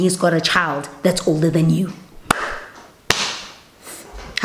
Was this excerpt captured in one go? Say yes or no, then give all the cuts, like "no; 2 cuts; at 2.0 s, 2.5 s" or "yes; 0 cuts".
yes; 0 cuts